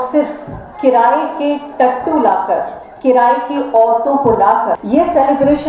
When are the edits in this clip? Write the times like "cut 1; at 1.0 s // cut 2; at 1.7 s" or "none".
cut 1; at 4.8 s